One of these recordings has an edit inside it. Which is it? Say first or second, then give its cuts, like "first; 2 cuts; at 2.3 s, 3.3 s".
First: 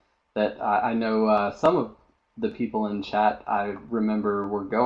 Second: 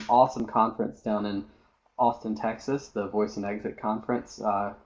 first; 1 cut; at 3.8 s